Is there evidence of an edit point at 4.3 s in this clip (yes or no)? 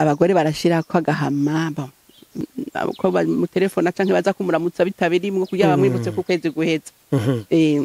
no